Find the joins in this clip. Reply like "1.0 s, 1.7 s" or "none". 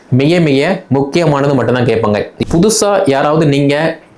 2.3 s